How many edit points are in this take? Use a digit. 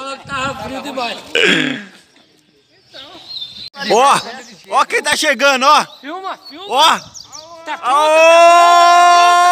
1